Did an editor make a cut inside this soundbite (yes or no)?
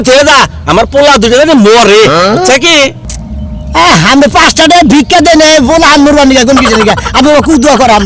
no